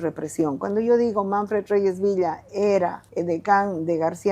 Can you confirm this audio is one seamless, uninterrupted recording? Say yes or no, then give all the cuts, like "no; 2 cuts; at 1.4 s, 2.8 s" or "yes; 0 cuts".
no; 1 cut; at 3.1 s